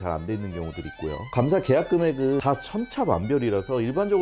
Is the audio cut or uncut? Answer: cut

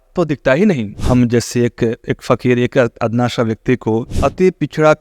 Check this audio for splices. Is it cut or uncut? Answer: cut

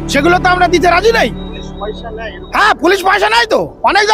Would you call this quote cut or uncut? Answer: uncut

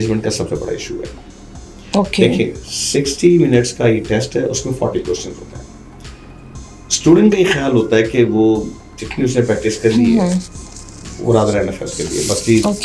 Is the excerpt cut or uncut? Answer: uncut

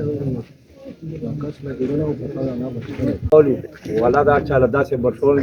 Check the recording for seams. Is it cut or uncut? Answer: cut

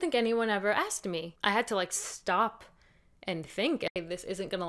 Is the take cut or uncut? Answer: cut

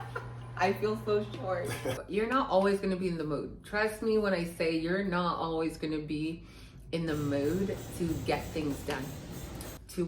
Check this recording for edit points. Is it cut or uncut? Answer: cut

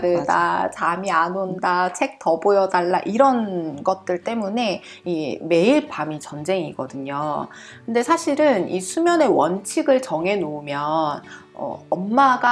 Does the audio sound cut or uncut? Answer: uncut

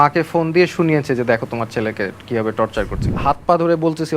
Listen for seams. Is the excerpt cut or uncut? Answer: cut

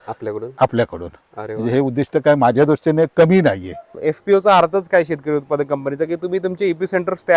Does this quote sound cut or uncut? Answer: cut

